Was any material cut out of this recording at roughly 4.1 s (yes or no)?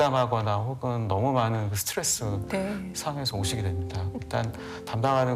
yes